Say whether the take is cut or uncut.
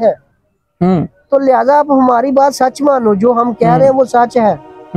uncut